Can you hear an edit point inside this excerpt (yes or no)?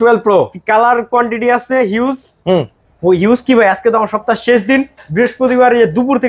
no